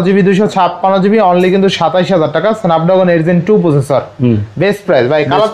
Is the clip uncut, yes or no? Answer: yes